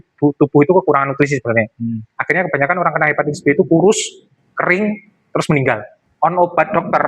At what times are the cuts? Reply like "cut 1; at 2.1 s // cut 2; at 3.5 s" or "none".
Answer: cut 1; at 6.0 s